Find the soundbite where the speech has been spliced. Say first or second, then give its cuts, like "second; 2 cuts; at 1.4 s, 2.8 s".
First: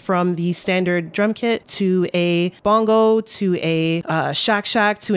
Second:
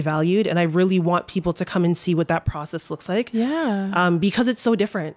first; 3 cuts; at 1.7 s, 2.5 s, 4.0 s